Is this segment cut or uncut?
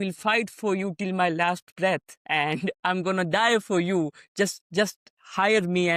uncut